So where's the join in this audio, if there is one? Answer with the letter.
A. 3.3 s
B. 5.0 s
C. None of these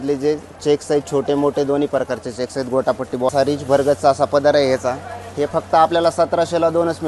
A